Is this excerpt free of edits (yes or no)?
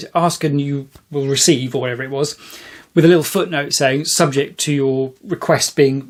yes